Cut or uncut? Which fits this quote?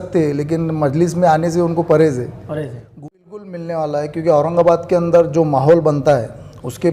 cut